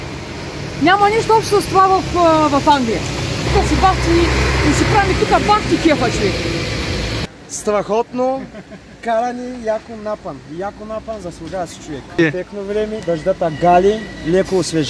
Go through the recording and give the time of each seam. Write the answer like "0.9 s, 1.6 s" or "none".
6.9 s, 12.2 s